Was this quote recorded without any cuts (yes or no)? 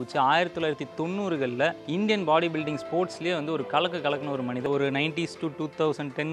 no